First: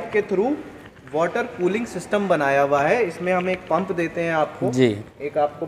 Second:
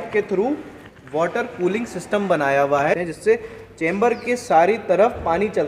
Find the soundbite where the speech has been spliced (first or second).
second